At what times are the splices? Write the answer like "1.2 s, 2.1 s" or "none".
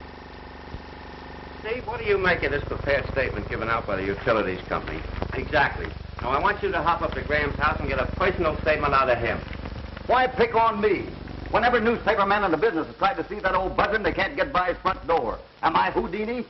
5.9 s